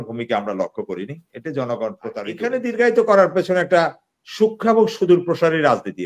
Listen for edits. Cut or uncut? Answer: cut